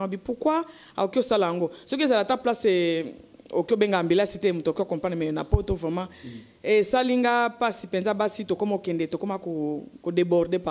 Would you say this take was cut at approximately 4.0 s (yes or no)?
no